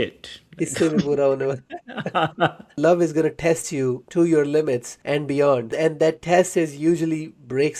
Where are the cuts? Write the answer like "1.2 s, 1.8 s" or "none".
2.8 s, 4.0 s, 4.9 s, 5.7 s